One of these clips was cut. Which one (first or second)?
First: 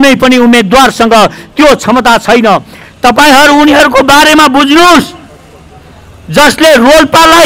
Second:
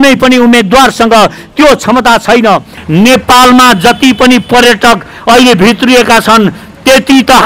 second